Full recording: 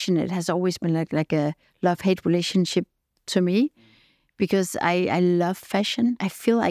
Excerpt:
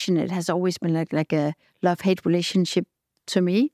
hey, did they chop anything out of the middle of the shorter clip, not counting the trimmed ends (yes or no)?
no